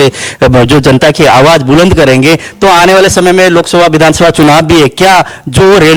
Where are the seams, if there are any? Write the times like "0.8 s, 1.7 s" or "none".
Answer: none

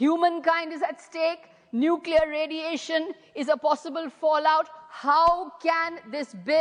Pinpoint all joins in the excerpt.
none

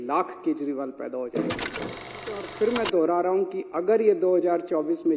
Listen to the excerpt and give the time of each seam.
2.1 s

